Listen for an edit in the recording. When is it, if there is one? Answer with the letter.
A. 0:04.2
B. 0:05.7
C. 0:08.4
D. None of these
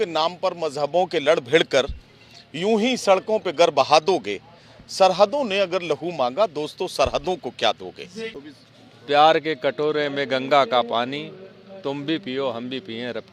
C